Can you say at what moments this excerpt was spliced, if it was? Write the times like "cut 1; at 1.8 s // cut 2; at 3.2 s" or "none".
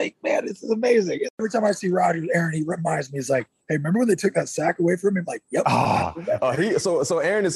cut 1; at 1.4 s